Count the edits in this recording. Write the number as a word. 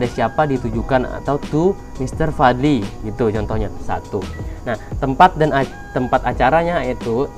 one